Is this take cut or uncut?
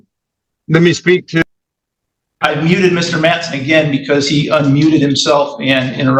uncut